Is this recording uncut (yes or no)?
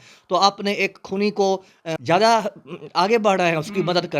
no